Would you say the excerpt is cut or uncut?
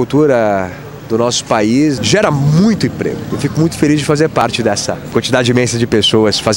cut